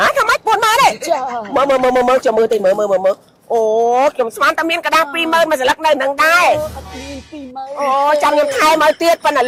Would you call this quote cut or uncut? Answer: uncut